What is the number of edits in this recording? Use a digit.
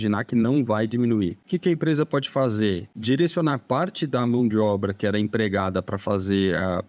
2